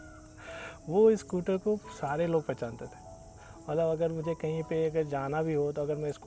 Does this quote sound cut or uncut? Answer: uncut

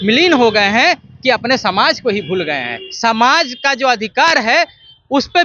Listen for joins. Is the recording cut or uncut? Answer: cut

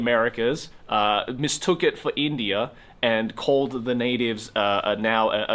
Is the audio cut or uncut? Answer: uncut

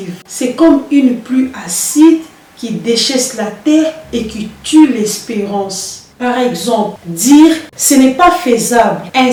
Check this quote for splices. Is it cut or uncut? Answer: uncut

